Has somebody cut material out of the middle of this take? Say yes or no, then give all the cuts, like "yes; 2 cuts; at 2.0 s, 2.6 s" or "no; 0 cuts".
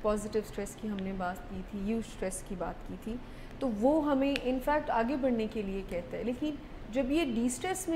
no; 0 cuts